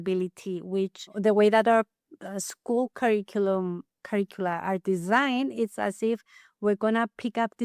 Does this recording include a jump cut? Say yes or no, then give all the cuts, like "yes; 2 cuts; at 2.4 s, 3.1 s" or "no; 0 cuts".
yes; 1 cut; at 1.1 s